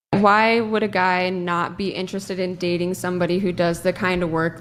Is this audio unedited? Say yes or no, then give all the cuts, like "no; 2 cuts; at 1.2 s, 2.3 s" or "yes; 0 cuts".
yes; 0 cuts